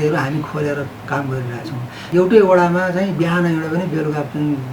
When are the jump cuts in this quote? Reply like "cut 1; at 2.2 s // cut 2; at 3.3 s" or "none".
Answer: cut 1; at 1.9 s